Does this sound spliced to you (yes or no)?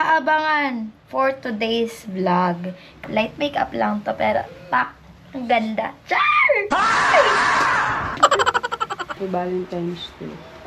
yes